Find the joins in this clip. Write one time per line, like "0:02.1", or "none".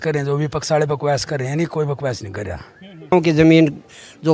0:03.1

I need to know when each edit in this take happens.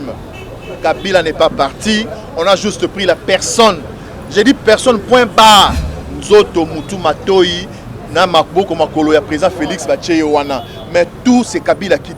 none

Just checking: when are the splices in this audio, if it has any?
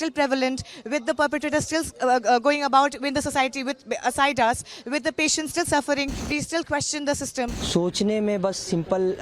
0:06.2
0:07.6

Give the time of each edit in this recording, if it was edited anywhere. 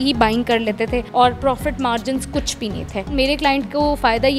0:01.1
0:03.1

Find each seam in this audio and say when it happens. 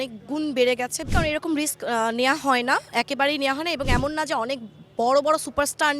0:01.1

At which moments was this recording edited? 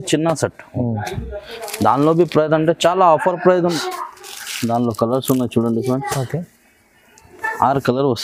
0:03.8

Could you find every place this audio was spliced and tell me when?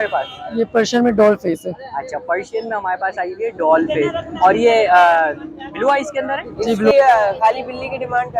0:06.9

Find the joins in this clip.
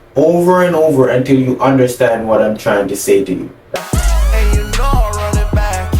0:03.8

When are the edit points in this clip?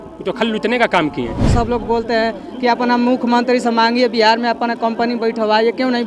0:01.5

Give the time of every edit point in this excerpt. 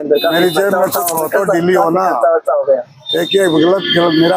none

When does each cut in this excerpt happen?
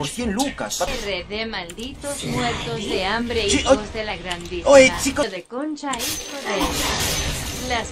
0:00.9
0:05.3

